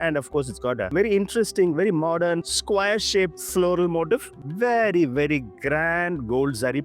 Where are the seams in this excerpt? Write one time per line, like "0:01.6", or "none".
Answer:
0:04.4

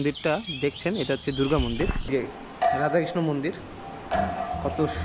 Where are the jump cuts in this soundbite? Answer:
0:02.1

